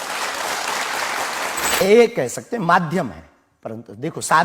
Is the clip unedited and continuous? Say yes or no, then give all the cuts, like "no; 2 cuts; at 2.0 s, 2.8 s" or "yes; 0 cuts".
no; 1 cut; at 1.8 s